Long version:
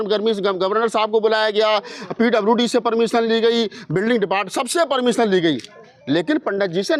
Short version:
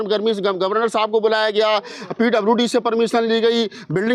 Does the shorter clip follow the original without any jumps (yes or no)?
yes